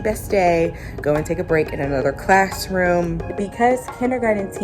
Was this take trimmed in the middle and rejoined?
yes; 1 cut; at 3.3 s

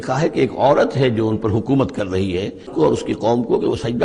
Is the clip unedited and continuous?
no; 1 cut; at 2.7 s

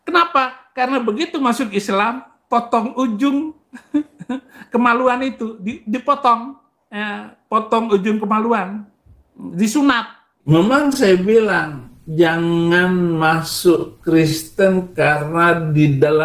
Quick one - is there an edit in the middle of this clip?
yes; 1 cut; at 10.4 s

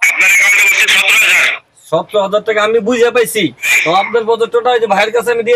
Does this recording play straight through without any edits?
no; 1 cut; at 3.7 s

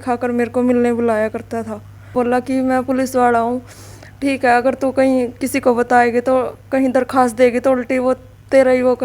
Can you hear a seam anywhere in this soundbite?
yes; 1 cut; at 2.1 s

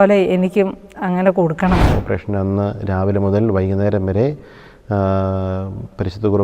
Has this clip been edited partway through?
yes; 1 cut; at 1.9 s

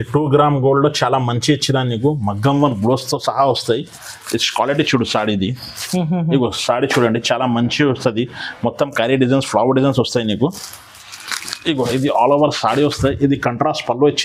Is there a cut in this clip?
no; 0 cuts

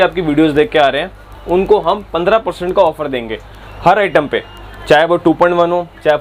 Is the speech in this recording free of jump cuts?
yes; 0 cuts

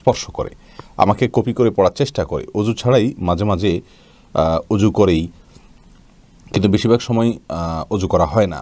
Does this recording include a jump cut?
no; 0 cuts

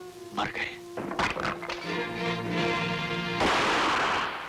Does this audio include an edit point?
yes; 1 cut; at 3.4 s

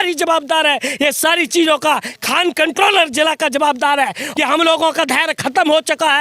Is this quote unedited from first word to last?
no; 1 cut; at 4.2 s

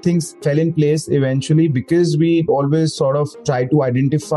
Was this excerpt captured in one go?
no; 1 cut; at 2.5 s

